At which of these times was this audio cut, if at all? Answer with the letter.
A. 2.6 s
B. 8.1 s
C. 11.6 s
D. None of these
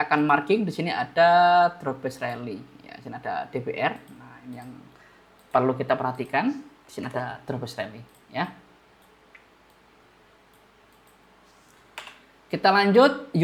D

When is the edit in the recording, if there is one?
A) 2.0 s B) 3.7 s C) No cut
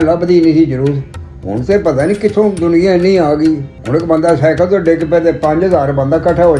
B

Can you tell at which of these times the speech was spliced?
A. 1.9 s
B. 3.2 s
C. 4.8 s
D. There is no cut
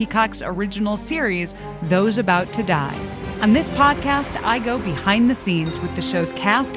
B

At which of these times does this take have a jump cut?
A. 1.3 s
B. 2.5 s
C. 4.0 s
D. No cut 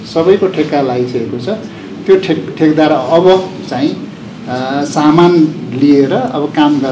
D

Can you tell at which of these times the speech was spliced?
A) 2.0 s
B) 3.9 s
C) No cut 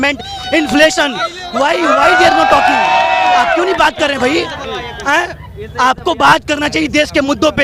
C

